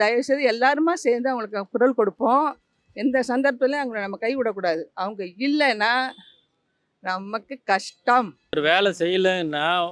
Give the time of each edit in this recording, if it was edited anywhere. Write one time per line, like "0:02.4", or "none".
0:08.6